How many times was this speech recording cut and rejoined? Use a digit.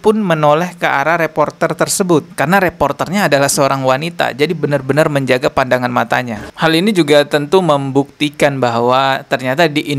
1